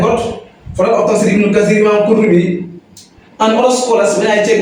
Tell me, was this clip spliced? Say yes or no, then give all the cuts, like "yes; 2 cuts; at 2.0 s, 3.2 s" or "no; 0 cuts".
no; 0 cuts